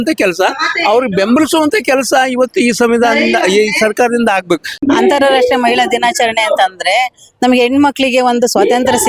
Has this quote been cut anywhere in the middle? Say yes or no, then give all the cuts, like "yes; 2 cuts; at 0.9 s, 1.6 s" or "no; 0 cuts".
yes; 1 cut; at 4.7 s